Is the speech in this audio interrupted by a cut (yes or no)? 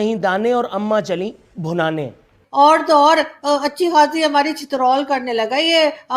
yes